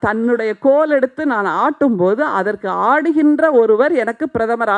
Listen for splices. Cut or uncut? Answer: uncut